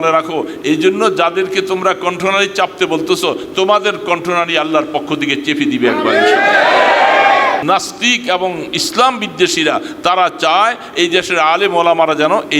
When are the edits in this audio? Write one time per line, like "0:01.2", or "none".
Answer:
0:07.6